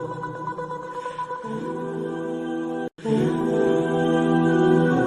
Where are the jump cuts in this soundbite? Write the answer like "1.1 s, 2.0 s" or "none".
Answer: none